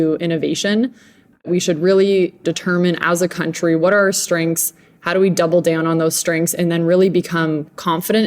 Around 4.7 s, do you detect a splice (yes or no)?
no